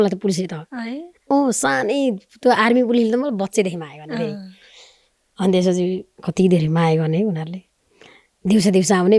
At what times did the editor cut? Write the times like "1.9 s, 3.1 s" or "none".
none